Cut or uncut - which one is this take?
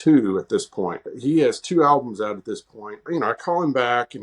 cut